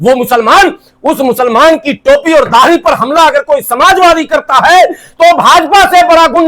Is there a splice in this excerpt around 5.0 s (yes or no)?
no